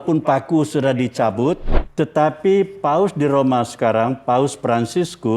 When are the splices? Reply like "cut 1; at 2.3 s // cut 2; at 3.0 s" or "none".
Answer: cut 1; at 1.8 s